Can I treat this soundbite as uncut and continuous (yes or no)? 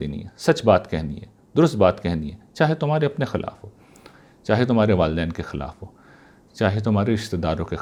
yes